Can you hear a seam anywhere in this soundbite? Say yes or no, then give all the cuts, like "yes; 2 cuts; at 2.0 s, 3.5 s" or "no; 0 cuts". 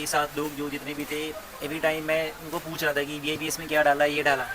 yes; 1 cut; at 3.4 s